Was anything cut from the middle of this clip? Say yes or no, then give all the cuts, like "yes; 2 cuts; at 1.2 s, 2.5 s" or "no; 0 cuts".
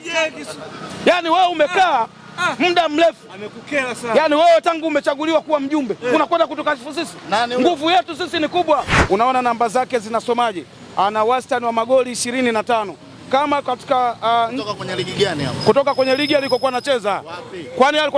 yes; 1 cut; at 8.9 s